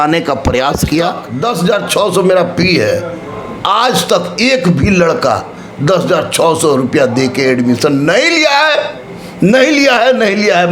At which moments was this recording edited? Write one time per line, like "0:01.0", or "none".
0:01.3